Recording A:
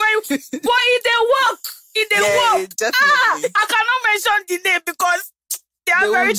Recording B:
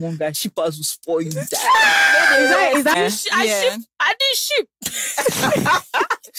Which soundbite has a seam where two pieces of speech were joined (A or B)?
B